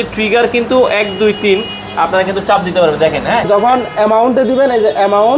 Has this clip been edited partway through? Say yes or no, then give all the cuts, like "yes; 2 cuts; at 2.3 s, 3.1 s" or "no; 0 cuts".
yes; 1 cut; at 3.5 s